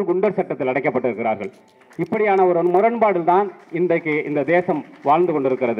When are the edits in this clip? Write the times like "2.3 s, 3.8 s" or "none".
none